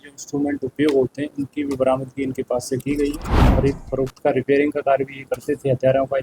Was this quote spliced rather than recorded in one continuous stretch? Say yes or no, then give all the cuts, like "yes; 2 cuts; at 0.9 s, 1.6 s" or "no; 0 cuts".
yes; 1 cut; at 3.4 s